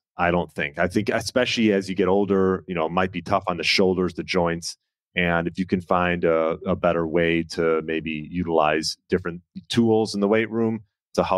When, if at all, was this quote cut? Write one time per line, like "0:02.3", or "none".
none